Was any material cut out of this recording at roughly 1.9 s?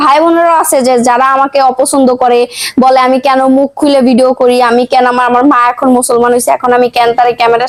no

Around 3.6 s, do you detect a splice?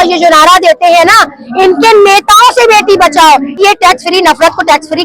yes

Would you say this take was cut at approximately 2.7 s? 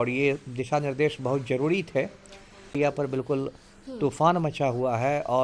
yes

